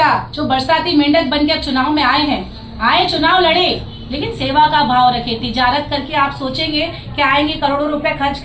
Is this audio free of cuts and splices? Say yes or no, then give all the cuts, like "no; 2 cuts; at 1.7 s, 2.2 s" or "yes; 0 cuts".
yes; 0 cuts